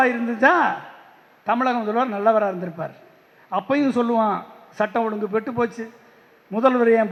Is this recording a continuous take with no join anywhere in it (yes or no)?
yes